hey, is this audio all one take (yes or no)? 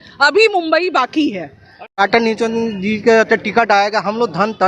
no